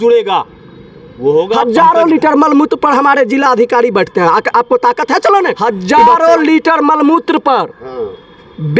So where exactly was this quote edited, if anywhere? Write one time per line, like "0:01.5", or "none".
0:01.6
0:05.6